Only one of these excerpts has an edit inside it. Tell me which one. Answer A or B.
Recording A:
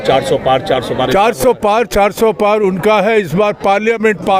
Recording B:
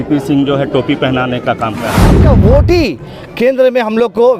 B